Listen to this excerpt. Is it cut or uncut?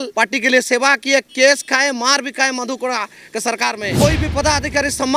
cut